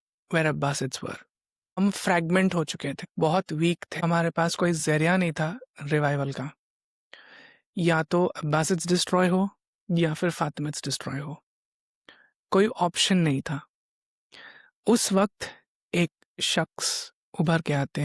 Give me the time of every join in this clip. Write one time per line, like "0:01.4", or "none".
0:01.8
0:03.0
0:03.9